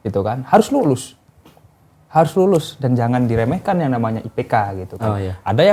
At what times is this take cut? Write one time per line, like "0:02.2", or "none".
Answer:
none

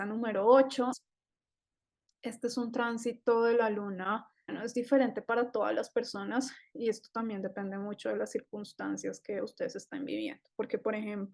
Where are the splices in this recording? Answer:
0:01.0
0:04.6

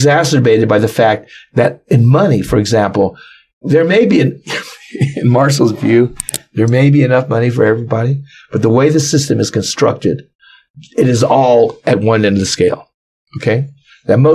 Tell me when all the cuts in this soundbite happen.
none

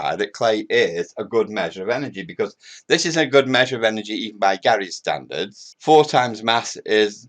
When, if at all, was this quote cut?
none

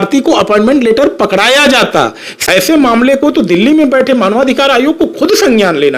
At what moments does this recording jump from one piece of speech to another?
0:02.5

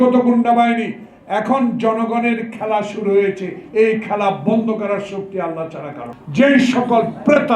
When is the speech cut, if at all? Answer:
0:06.1

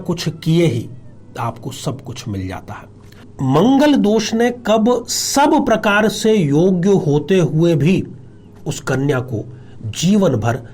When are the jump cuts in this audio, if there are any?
0:03.2

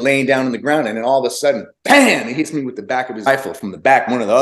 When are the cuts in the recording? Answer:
0:03.3

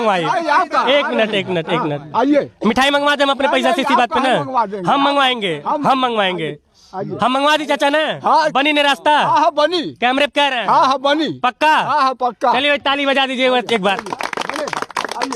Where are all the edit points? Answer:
none

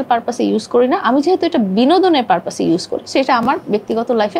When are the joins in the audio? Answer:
none

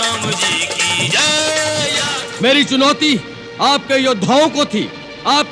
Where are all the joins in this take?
0:02.2

